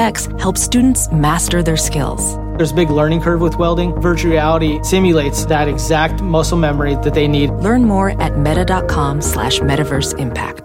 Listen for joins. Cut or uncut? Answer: uncut